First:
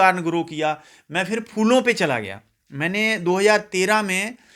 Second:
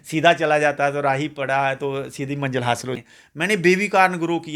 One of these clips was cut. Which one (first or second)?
second